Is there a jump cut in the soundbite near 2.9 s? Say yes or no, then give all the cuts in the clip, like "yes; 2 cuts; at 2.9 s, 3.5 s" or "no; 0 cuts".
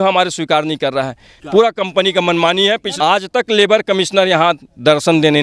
yes; 1 cut; at 2.9 s